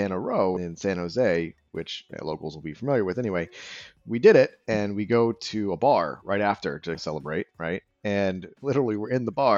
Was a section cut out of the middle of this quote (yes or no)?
yes